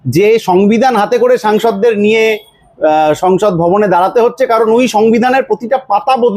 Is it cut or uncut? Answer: uncut